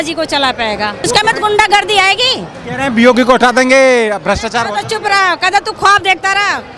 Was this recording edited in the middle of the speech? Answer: yes; 1 cut; at 1.1 s

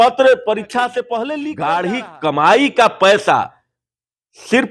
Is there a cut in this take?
yes; 1 cut; at 1.2 s

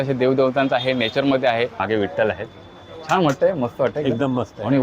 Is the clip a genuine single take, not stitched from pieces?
no; 1 cut; at 1.8 s

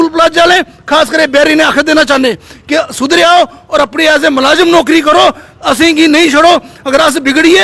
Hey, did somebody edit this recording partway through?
no; 0 cuts

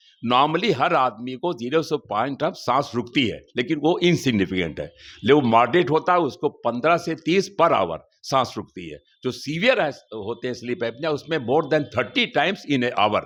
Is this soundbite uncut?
yes; 0 cuts

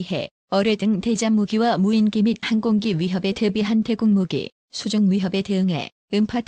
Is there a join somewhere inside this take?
no; 0 cuts

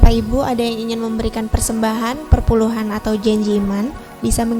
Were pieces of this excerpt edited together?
no; 0 cuts

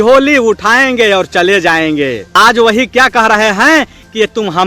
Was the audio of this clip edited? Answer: yes; 1 cut; at 2.2 s

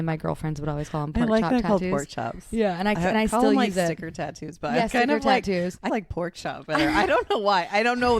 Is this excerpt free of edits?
no; 1 cut; at 5.9 s

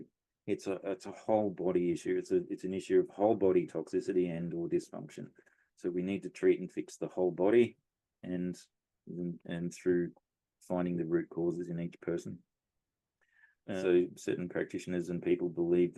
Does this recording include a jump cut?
yes; 1 cut; at 13.8 s

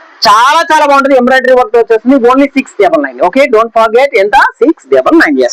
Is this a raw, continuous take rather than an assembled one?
yes; 0 cuts

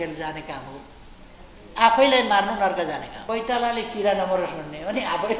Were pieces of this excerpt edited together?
yes; 1 cut; at 3.1 s

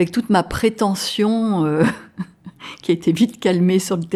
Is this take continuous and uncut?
yes; 0 cuts

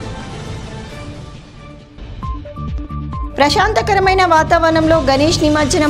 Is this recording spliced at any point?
yes; 1 cut; at 1.9 s

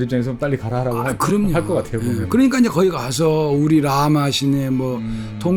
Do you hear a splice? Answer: no; 0 cuts

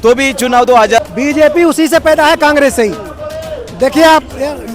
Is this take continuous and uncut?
no; 1 cut; at 1.0 s

